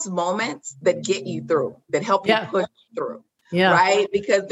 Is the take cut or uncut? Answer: uncut